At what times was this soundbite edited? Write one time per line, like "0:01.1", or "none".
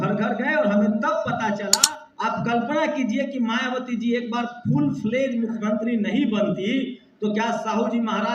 0:01.8